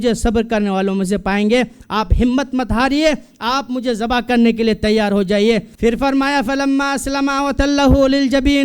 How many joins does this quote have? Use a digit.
1